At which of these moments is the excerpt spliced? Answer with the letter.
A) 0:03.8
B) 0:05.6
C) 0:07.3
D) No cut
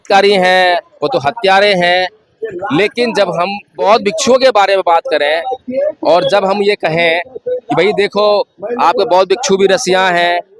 A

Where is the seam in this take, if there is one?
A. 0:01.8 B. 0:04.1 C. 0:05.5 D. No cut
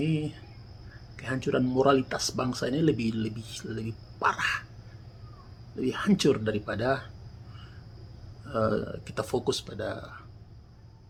D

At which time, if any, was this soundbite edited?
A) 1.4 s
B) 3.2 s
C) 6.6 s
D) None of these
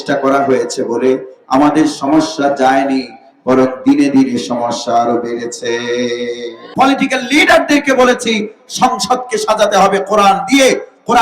C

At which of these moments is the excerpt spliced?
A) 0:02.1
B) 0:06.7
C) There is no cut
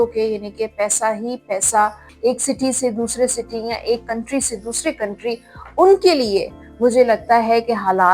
A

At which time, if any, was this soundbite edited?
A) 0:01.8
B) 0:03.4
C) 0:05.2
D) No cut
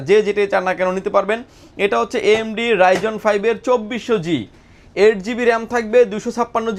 D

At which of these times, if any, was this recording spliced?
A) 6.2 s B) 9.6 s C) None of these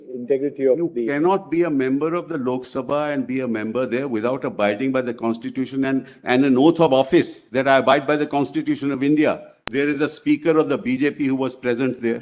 B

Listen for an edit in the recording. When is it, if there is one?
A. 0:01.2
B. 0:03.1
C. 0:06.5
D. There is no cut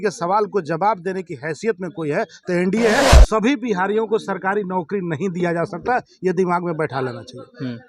B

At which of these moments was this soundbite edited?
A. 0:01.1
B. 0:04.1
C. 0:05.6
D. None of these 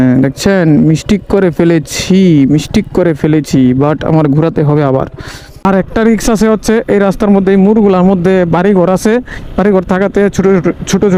C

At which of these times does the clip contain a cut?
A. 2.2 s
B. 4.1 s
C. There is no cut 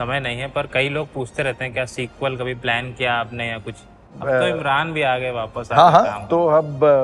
B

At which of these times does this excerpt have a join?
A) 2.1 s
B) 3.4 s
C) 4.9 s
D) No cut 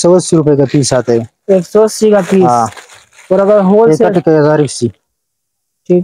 D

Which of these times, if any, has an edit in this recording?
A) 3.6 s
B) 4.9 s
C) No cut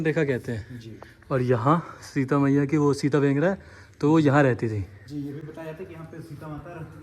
C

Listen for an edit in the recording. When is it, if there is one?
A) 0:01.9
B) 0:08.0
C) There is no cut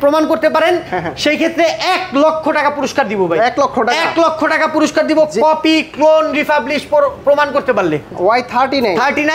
B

